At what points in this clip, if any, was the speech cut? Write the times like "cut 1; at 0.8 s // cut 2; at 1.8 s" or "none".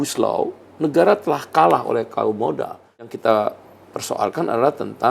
cut 1; at 3.0 s